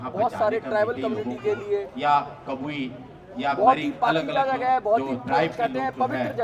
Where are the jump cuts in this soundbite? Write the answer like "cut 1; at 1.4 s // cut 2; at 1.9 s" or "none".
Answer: none